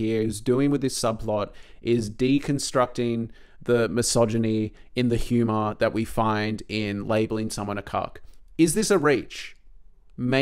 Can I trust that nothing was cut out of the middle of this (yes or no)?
yes